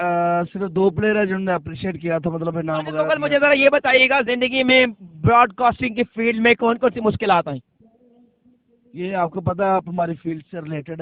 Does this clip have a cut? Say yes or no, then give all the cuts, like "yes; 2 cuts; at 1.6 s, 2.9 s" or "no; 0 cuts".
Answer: yes; 1 cut; at 3.0 s